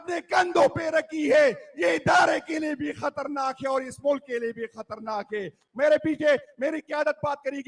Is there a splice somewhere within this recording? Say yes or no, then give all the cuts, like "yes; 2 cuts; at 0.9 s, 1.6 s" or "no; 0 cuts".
no; 0 cuts